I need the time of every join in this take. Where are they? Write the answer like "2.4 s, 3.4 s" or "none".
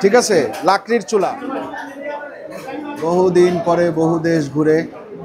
1.4 s, 2.9 s